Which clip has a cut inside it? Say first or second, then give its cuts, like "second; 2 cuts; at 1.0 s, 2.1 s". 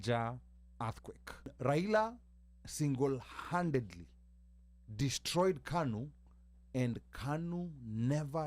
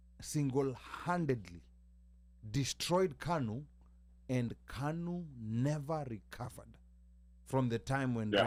first; 1 cut; at 1.5 s